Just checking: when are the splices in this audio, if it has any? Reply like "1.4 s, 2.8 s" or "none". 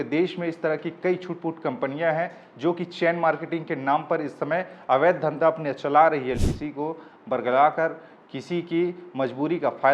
6.4 s